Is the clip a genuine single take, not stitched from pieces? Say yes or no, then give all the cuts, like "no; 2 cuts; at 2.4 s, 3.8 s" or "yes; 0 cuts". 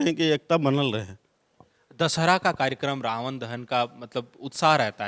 yes; 0 cuts